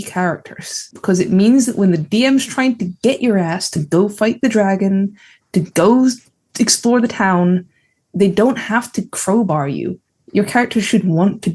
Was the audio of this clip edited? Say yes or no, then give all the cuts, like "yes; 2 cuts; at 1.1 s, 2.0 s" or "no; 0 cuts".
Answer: no; 0 cuts